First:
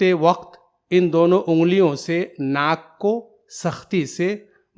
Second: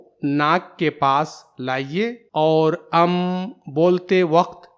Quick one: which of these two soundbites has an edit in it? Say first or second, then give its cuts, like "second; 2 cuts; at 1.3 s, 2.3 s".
second; 1 cut; at 2.2 s